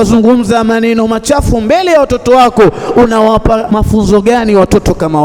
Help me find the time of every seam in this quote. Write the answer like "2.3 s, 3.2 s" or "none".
3.7 s